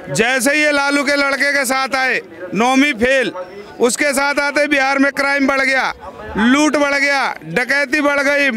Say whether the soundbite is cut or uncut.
uncut